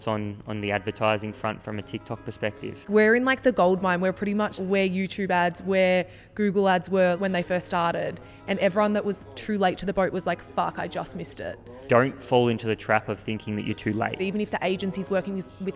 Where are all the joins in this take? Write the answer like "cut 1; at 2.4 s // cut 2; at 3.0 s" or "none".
cut 1; at 2.9 s // cut 2; at 4.5 s // cut 3; at 7.2 s // cut 4; at 11.8 s // cut 5; at 14.2 s